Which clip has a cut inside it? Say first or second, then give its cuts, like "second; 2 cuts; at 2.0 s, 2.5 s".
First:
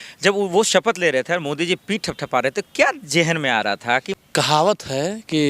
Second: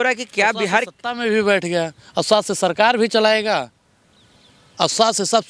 first; 1 cut; at 4.1 s